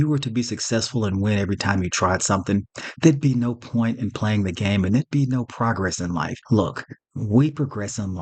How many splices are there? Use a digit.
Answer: 1